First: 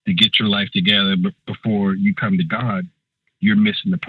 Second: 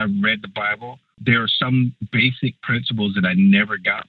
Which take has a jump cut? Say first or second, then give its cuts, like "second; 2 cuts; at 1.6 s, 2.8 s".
second; 2 cuts; at 1.2 s, 2.0 s